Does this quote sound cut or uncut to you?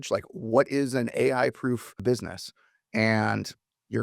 cut